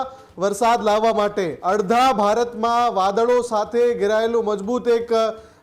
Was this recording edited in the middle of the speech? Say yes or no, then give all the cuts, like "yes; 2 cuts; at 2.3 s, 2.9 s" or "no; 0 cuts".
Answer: yes; 1 cut; at 1.6 s